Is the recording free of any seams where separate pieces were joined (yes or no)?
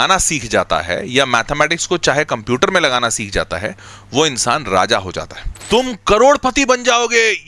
no